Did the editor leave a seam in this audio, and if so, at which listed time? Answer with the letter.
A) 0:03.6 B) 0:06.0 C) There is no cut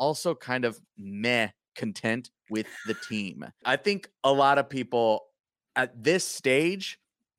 A